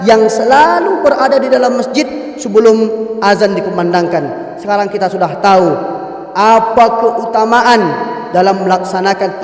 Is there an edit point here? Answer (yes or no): no